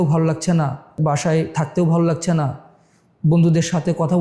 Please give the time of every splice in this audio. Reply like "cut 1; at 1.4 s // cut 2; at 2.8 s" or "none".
cut 1; at 1.0 s